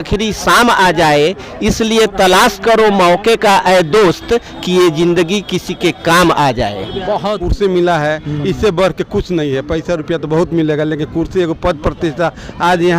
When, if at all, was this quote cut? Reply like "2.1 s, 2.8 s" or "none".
7.4 s